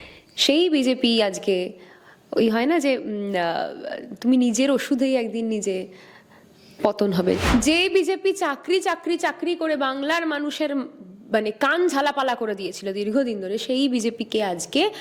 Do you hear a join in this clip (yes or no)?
yes